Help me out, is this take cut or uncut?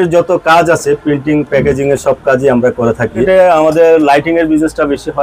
cut